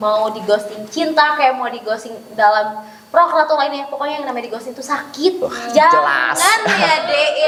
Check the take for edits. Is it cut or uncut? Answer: uncut